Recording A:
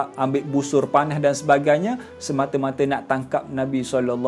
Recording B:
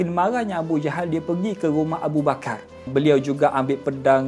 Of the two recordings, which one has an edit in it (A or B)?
B